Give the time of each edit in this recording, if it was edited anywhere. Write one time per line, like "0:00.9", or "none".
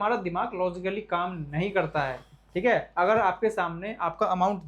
none